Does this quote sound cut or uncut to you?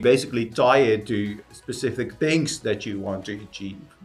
cut